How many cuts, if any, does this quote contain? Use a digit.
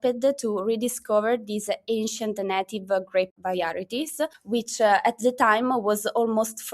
1